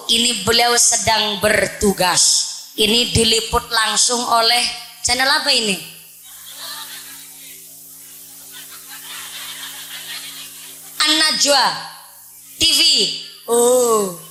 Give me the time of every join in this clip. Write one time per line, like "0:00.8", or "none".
none